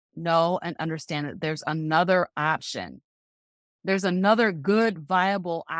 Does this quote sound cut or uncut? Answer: uncut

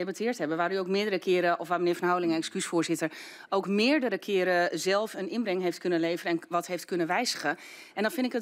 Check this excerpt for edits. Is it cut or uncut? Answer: uncut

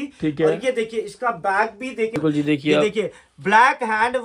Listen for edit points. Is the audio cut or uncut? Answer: cut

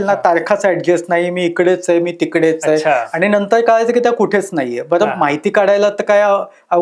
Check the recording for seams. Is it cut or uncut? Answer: uncut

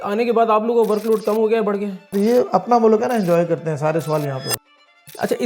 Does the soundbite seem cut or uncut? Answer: cut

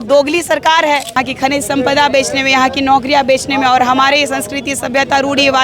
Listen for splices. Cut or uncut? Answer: cut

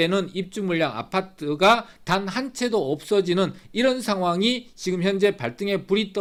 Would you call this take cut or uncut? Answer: uncut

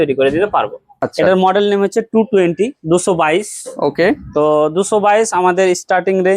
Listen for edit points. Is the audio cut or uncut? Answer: cut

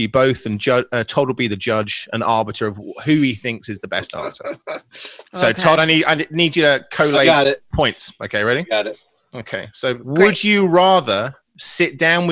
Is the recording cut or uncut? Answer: cut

